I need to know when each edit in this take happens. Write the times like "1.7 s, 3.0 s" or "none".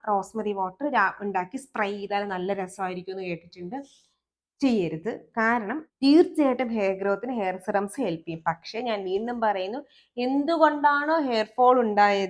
5.8 s